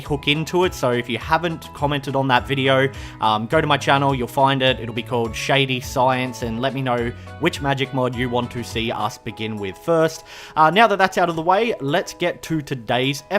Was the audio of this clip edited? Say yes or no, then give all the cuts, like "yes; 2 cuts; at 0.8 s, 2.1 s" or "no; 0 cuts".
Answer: yes; 1 cut; at 1.2 s